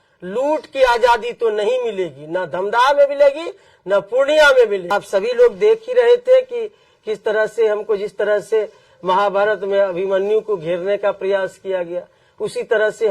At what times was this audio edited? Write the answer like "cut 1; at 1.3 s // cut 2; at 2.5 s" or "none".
cut 1; at 4.9 s

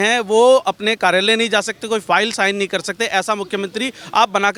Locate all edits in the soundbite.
none

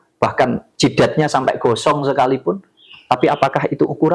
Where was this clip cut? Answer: none

